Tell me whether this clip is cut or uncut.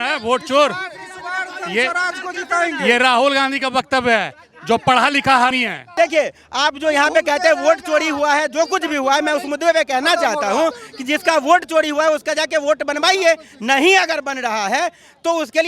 cut